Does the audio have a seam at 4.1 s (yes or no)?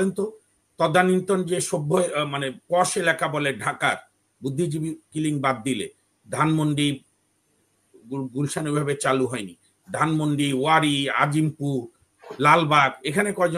no